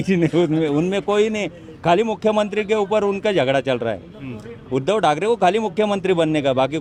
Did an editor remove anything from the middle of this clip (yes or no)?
no